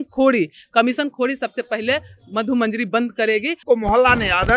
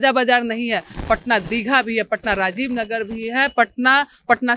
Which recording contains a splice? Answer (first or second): first